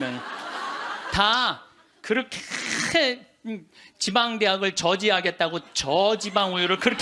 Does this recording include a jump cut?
no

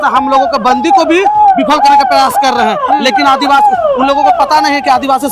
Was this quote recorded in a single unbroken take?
yes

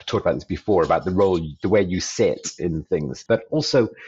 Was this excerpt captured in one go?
no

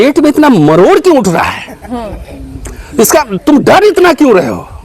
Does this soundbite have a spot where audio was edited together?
no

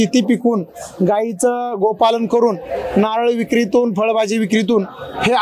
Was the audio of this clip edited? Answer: no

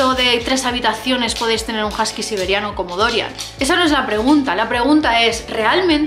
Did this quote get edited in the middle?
no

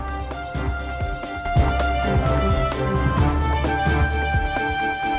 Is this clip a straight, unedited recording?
no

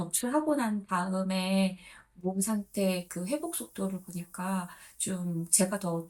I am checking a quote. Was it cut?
no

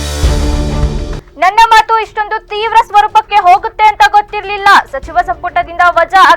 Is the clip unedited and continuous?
no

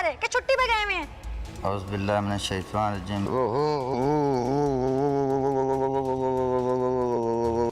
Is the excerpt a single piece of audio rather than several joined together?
yes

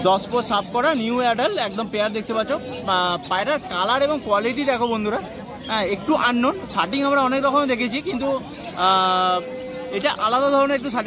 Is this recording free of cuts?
yes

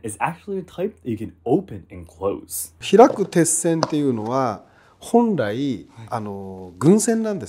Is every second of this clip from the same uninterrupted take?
yes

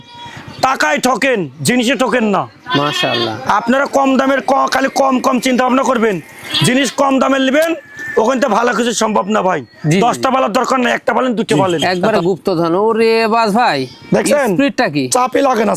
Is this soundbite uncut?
no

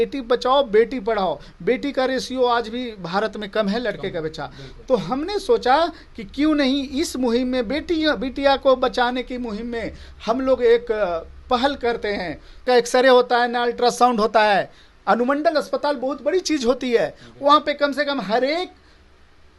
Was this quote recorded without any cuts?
no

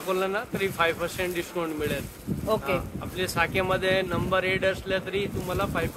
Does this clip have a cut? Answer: no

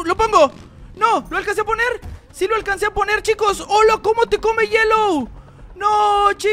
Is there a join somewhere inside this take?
no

